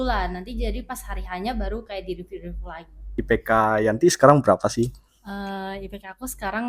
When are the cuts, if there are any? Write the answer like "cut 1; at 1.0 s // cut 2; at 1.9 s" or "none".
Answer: cut 1; at 3.1 s